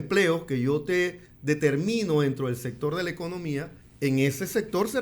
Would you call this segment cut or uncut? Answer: cut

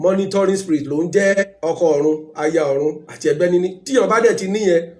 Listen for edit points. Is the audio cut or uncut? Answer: cut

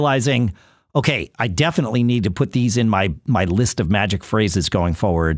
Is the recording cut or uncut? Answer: uncut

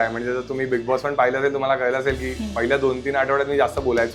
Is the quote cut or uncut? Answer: uncut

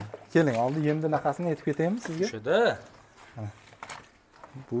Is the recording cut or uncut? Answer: uncut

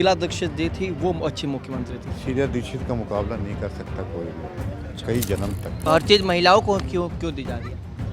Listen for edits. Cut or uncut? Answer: cut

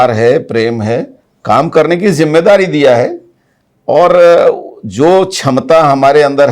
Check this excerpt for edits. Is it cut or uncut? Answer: uncut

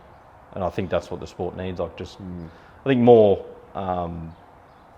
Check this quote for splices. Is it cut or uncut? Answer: uncut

